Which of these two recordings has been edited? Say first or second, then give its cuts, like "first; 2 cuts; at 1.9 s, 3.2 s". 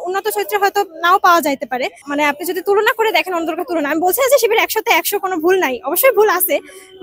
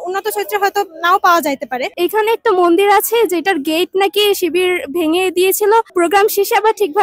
second; 2 cuts; at 1.9 s, 5.9 s